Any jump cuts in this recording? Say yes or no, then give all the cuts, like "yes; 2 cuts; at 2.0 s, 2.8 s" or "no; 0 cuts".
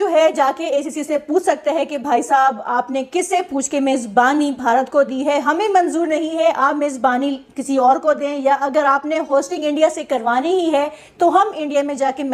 no; 0 cuts